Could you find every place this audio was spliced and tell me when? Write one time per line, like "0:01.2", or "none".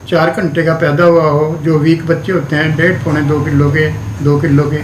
none